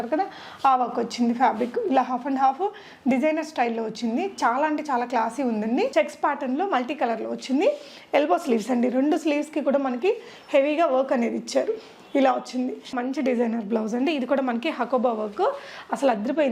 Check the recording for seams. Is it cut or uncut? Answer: cut